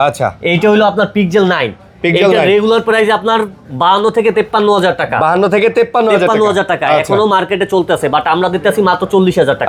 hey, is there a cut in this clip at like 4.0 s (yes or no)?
no